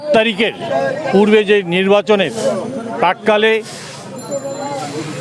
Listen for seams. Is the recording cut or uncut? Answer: uncut